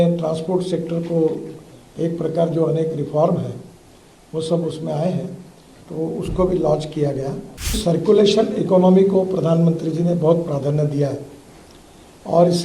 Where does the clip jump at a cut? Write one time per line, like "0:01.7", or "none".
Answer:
0:07.8